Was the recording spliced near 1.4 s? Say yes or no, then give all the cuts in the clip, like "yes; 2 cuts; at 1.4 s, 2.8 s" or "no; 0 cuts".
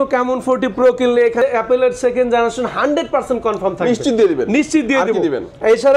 yes; 1 cut; at 1.4 s